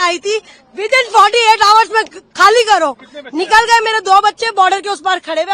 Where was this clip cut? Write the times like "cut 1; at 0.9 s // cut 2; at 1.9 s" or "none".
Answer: none